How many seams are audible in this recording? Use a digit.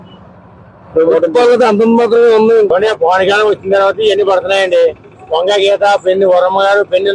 1